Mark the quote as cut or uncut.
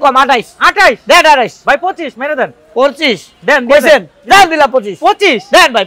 uncut